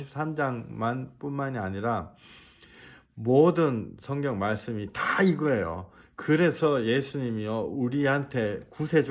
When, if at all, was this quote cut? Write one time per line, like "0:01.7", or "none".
none